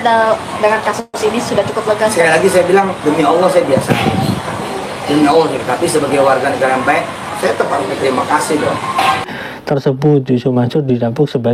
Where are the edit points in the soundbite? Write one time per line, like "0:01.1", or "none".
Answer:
0:09.3